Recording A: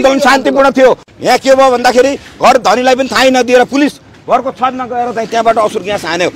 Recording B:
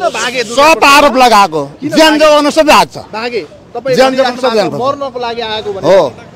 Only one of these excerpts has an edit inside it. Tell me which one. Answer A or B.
A